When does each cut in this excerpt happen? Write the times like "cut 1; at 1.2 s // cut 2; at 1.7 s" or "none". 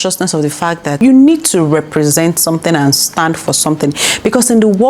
cut 1; at 0.9 s